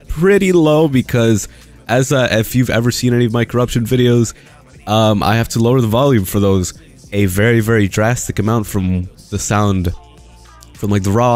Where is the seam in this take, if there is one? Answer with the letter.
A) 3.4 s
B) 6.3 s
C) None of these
C